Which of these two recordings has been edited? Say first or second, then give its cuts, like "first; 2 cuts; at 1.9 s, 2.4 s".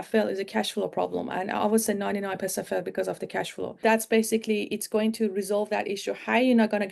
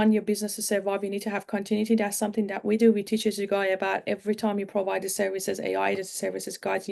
first; 1 cut; at 3.7 s